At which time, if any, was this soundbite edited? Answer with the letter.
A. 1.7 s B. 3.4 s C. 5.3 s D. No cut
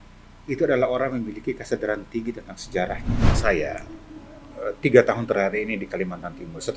B